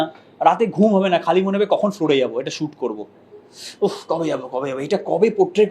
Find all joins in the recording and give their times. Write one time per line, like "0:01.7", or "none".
none